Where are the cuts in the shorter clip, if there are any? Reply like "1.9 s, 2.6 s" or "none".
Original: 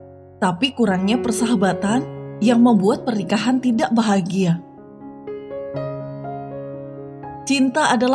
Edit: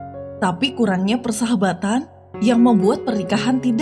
none